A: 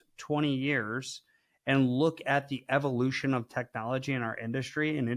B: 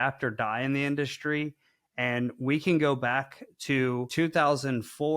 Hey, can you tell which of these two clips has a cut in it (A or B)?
B